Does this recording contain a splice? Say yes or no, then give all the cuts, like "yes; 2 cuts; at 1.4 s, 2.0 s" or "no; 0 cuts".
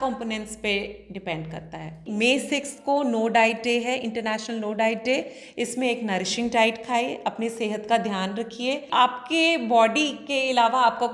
yes; 2 cuts; at 2.0 s, 8.8 s